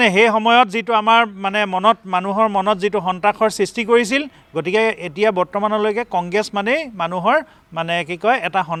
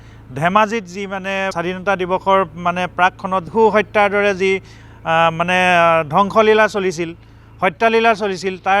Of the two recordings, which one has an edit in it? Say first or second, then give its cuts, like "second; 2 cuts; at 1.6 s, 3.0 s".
second; 2 cuts; at 1.5 s, 3.5 s